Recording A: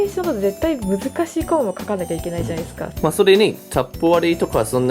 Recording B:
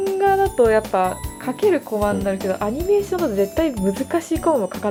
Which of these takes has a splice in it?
A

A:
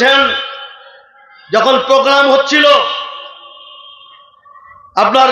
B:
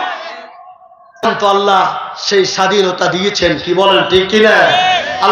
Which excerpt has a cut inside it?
B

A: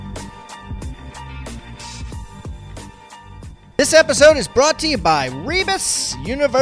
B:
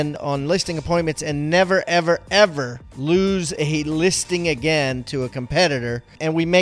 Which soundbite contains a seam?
A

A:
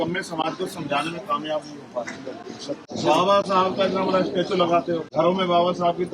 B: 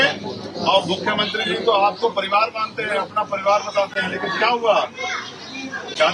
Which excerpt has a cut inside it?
A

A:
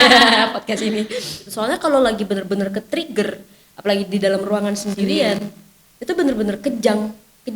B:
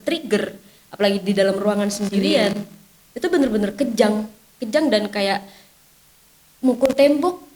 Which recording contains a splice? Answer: A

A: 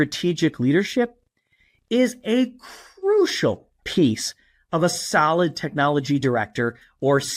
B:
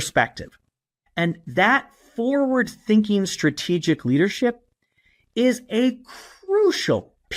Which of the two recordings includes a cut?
B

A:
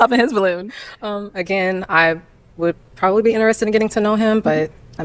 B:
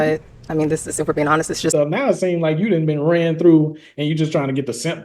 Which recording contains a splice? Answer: B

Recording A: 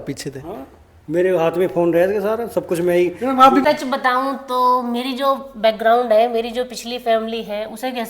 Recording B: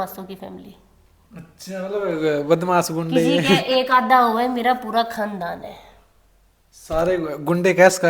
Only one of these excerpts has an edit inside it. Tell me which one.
A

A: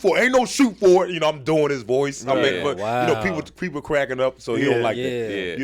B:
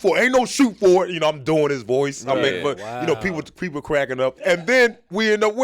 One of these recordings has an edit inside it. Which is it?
B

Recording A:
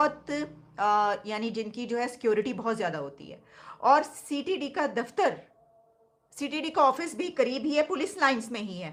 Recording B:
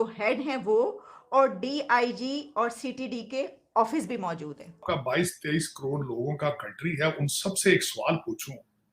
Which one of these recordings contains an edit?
B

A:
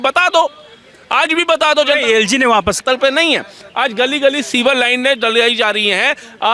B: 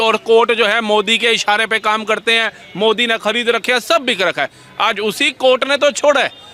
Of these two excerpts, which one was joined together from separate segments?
A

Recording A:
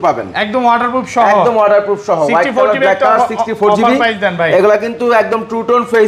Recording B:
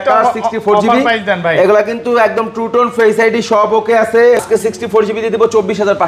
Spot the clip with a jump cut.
B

